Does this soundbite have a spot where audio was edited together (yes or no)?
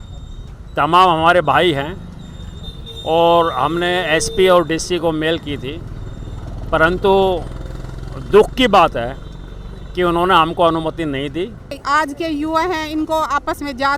yes